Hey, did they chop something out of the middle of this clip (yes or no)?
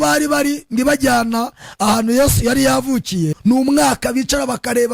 yes